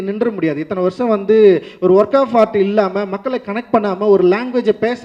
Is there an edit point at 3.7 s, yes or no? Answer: no